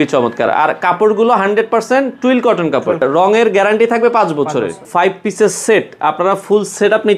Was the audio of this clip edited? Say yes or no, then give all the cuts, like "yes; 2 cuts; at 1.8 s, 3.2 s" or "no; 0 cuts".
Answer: yes; 2 cuts; at 3.0 s, 4.9 s